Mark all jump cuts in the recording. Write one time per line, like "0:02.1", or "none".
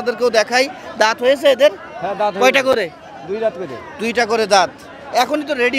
none